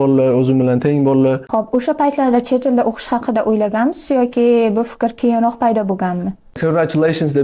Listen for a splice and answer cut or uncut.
cut